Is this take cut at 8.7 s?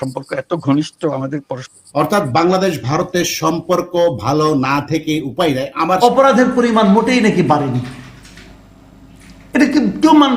no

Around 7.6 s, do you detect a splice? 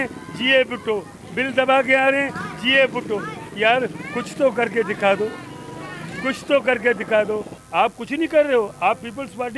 yes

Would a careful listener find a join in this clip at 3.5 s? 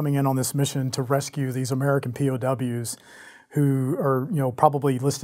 no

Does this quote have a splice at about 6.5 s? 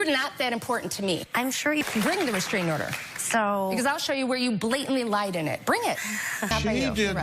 yes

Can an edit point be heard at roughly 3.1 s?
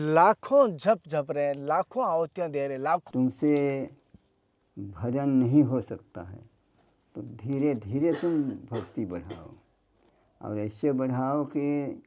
yes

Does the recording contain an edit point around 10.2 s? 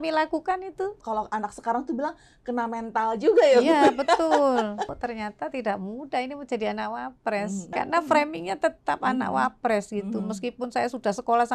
no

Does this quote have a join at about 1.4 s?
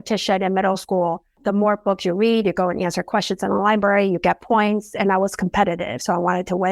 yes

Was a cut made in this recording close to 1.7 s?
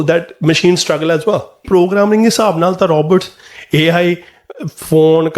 yes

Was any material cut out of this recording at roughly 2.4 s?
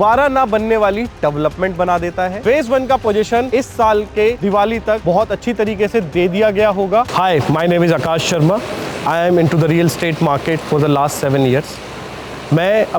yes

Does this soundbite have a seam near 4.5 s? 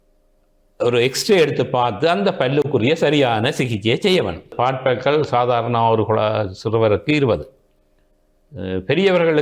yes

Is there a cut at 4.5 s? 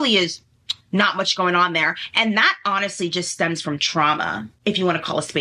yes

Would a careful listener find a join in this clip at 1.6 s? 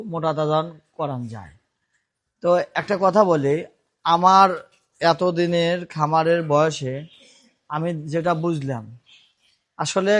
no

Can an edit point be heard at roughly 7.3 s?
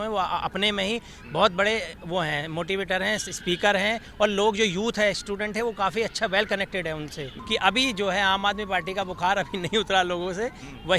yes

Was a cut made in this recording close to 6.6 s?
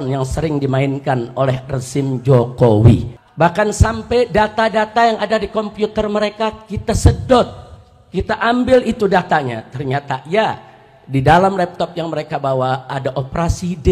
no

